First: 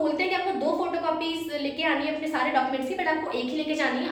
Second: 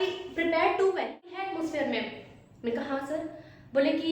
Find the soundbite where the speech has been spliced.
second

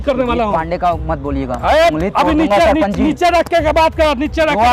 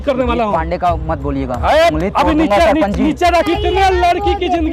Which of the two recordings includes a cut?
second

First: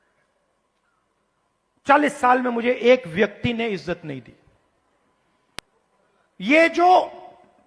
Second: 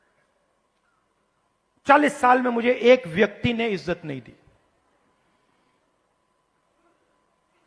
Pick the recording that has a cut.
first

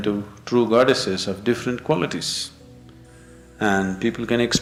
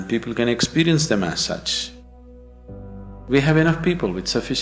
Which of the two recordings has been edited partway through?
second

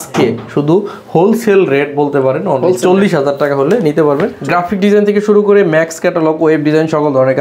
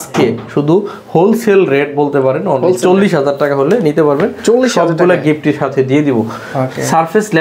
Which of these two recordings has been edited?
first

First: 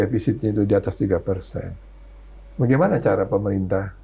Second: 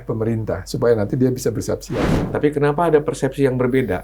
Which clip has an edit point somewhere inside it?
second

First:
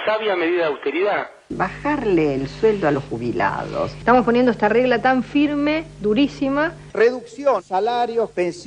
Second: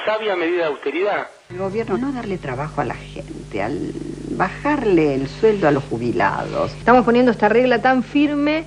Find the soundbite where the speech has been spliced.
first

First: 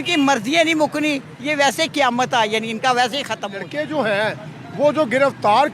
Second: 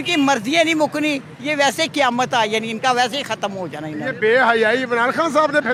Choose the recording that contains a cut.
first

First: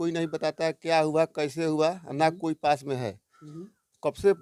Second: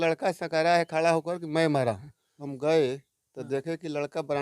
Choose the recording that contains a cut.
second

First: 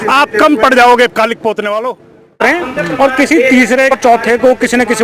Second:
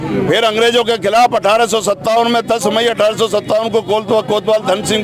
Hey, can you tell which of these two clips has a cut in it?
first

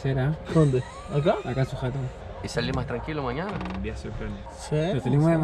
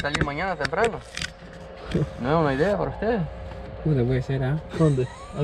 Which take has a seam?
first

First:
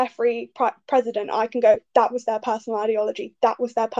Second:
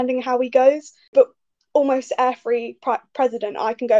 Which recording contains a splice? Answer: second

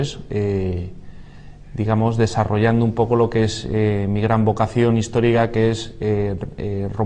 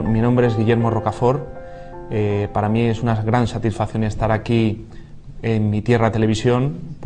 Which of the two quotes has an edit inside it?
first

